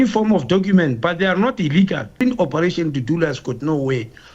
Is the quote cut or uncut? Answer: cut